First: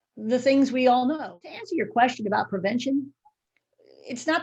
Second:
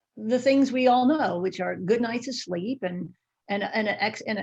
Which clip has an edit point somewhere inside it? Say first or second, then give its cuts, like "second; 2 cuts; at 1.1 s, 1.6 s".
first; 1 cut; at 1.5 s